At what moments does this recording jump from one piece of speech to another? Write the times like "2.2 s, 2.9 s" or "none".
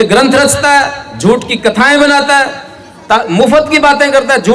none